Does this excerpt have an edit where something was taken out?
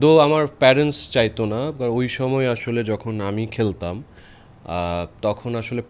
no; 0 cuts

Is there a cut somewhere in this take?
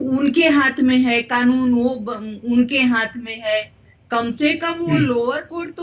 no; 0 cuts

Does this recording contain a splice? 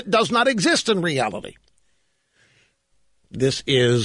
yes; 1 cut; at 2.8 s

